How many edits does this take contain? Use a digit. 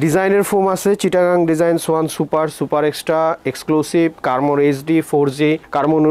0